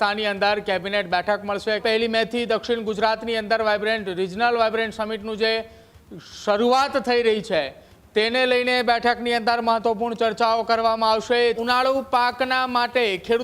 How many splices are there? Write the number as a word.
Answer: two